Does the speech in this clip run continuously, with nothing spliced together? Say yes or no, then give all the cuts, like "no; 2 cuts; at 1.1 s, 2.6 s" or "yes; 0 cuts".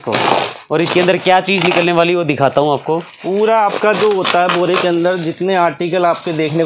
yes; 0 cuts